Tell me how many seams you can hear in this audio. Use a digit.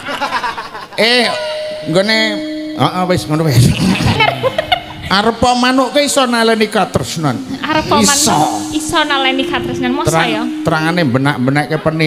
1